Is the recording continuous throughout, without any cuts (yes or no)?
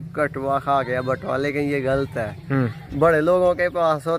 no